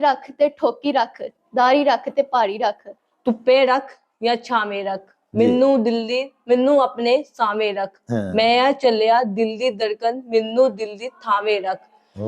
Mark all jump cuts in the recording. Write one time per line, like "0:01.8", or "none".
0:03.0